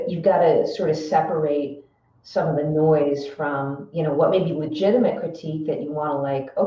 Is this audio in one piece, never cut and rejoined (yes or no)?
yes